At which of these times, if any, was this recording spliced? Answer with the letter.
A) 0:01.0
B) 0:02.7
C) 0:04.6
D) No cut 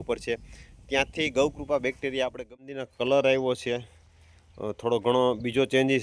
B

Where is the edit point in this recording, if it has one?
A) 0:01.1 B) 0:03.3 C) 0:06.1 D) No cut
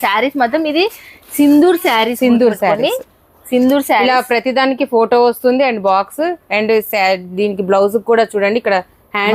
D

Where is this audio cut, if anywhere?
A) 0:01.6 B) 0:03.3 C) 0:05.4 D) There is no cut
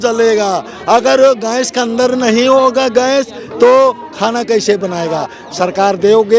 C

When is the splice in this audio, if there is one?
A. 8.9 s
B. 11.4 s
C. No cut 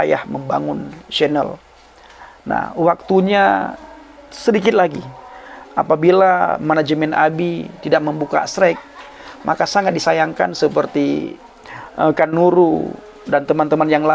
B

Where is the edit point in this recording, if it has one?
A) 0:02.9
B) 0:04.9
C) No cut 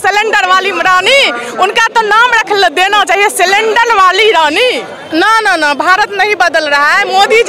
B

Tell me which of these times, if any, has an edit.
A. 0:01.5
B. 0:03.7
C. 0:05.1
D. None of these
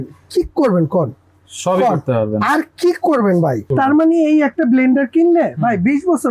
B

